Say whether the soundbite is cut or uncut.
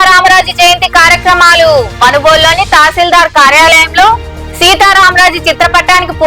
uncut